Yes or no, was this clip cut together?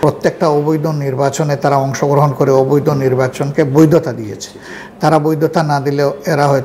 no